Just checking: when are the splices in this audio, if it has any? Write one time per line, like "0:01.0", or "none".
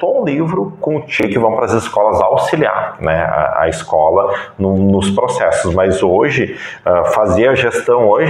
0:01.2